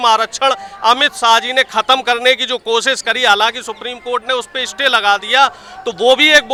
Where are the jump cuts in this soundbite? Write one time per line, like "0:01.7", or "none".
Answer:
none